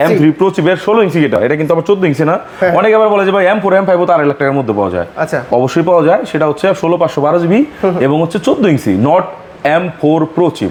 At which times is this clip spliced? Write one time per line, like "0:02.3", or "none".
none